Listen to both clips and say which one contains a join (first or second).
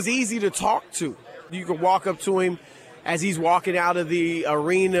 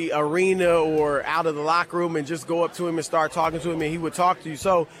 first